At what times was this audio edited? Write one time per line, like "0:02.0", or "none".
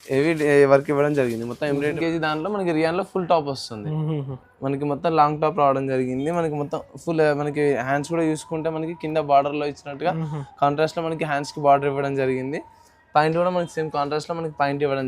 0:01.8

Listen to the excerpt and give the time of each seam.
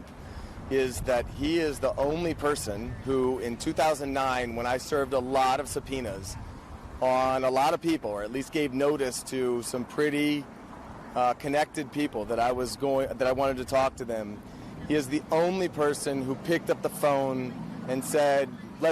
none

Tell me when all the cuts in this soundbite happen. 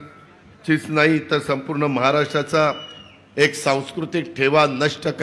none

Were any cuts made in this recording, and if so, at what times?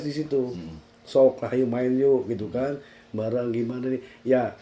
none

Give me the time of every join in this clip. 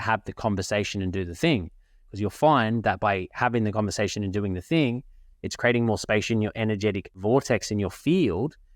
0:07.2

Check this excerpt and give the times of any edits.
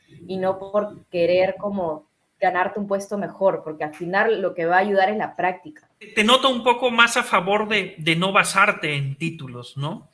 0:06.0

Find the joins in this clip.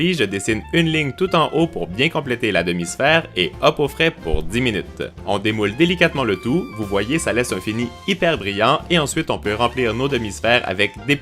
0:01.6

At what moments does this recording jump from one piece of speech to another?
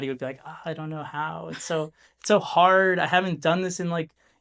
none

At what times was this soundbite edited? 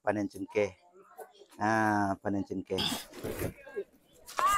0:02.8

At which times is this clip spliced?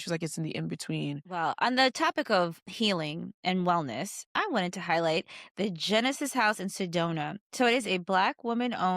0:01.3
0:02.6
0:04.2

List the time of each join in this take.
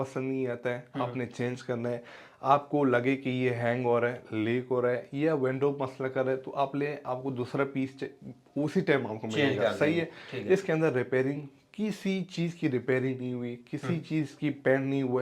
none

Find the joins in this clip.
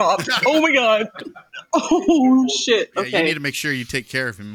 0:03.4

